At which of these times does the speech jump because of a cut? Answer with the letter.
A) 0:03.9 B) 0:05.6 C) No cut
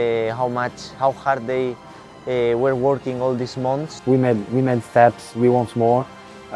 A